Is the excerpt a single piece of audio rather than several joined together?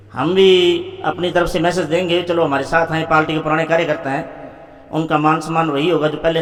yes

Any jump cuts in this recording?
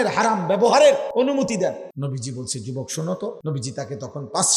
yes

